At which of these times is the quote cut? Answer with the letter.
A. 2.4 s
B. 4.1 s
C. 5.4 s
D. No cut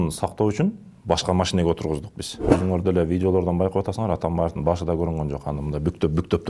A